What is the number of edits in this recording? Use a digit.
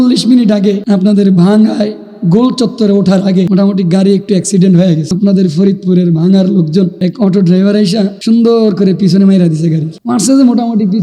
6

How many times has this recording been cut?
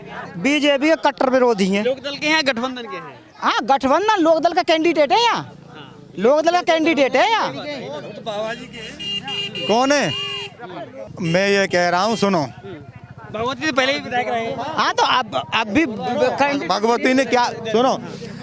0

